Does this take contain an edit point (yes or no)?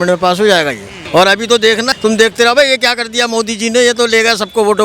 yes